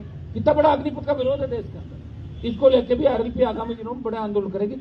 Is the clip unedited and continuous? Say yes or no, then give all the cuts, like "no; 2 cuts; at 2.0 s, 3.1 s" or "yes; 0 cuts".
yes; 0 cuts